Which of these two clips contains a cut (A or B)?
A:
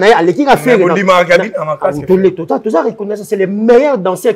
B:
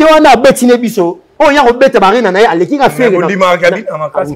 B